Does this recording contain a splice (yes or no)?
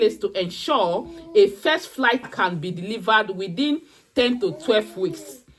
yes